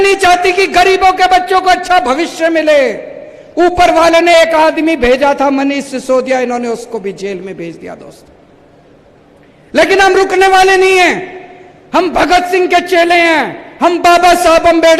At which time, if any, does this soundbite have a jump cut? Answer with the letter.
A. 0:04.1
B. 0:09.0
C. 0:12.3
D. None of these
D